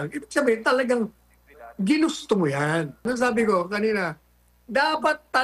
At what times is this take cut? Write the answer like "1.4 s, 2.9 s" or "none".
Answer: 3.0 s